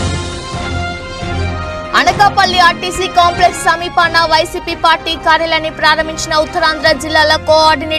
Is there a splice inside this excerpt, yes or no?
yes